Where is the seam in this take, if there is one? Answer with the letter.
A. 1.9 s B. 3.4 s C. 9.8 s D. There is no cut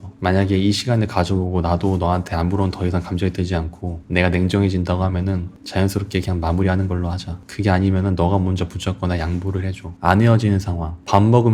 C